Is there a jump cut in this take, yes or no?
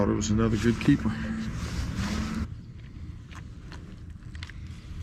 no